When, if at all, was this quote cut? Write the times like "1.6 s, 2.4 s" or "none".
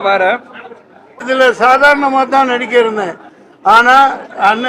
1.2 s